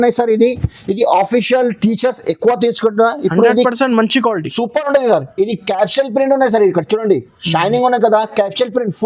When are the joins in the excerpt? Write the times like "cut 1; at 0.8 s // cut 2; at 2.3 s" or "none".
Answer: none